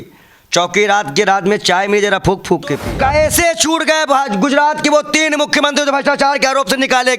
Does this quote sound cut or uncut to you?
cut